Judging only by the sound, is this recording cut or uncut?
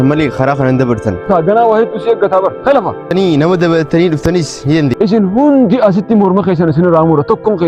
cut